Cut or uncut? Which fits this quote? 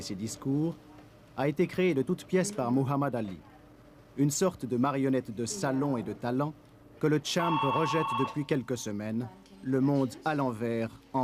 uncut